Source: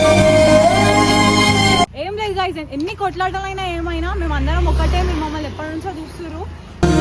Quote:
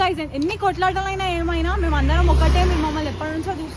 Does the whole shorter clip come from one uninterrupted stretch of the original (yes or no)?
yes